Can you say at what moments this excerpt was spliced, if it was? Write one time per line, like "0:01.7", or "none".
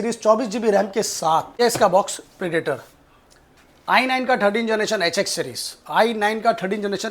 0:01.5